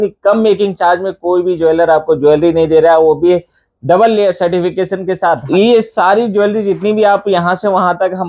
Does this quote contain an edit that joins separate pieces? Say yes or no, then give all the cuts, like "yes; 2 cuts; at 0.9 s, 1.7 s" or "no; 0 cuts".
yes; 1 cut; at 5.4 s